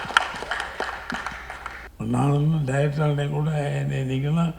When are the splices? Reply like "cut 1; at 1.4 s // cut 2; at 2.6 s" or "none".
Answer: cut 1; at 1.9 s